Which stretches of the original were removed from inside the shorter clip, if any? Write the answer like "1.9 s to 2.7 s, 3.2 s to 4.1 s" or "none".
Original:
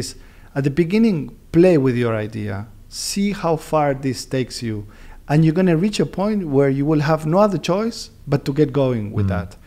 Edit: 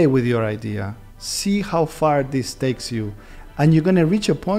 none